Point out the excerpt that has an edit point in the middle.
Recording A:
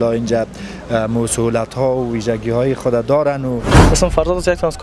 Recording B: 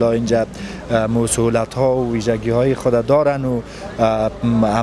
A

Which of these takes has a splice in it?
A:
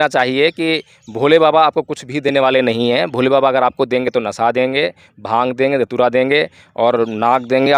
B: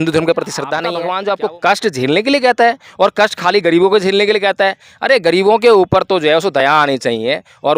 B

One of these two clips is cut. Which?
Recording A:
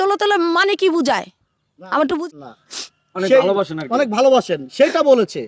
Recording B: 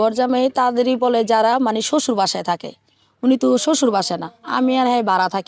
A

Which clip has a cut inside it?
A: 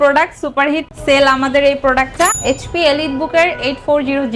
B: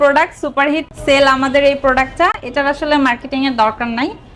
A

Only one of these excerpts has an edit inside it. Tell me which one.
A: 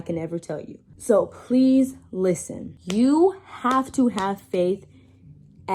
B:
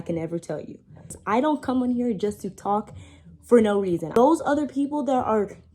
B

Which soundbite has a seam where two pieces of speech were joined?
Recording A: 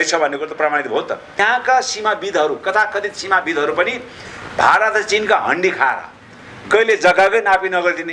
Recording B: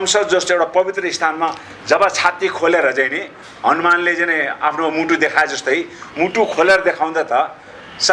A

